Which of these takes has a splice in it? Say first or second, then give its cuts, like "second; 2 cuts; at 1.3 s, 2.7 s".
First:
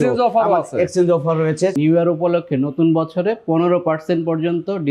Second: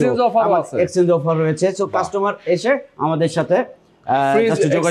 first; 1 cut; at 1.8 s